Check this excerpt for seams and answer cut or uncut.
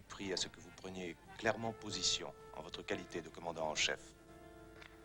uncut